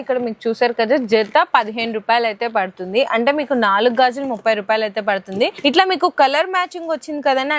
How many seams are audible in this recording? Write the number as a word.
zero